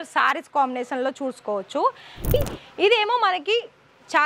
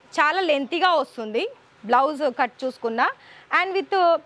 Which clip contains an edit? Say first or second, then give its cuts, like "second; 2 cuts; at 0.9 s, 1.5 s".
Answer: first; 1 cut; at 2.3 s